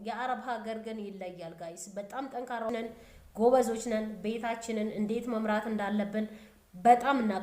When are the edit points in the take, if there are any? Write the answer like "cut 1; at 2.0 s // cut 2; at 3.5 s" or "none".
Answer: cut 1; at 2.7 s